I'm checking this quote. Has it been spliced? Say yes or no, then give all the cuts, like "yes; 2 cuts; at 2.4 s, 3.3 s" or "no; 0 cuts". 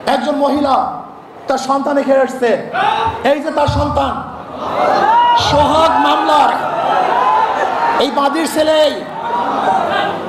no; 0 cuts